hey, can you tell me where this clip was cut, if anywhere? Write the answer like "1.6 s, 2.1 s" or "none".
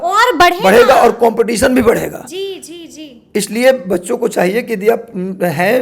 none